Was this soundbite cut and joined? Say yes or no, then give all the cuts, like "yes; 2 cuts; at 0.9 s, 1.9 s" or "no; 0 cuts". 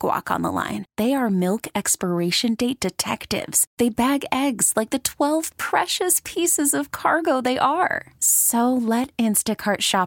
no; 0 cuts